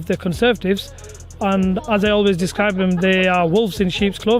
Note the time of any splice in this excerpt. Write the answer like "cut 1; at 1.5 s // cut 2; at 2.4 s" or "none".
none